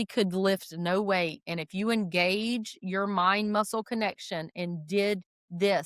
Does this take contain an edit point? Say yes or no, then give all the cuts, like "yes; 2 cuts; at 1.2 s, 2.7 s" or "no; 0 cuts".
no; 0 cuts